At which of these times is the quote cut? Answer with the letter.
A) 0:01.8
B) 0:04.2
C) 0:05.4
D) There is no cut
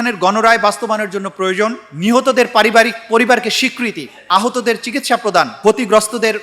A